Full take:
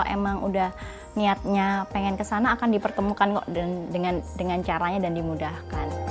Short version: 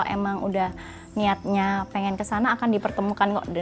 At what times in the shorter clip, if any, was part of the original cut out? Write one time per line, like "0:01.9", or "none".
none

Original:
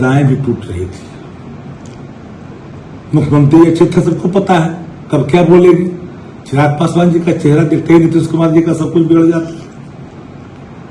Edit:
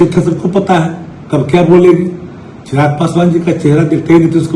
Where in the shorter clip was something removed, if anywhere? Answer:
none

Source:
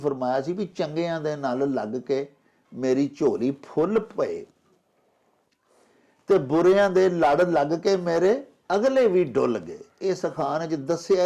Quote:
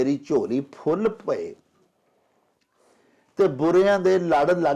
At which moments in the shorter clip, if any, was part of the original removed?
none

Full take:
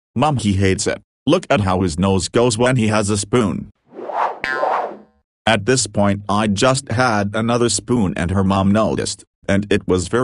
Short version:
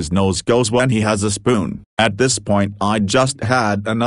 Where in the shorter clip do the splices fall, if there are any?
0:01.8

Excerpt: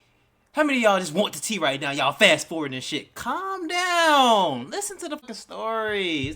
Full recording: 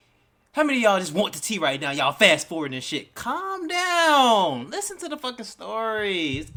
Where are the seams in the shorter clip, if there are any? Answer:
0:05.2

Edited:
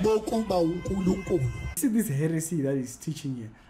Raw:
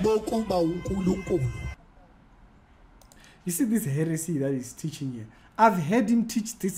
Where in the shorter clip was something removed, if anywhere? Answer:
0:01.7

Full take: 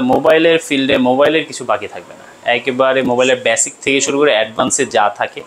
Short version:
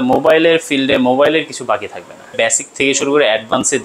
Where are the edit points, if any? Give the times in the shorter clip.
0:02.3

